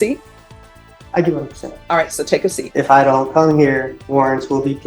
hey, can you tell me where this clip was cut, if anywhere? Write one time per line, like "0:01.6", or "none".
0:02.6
0:04.0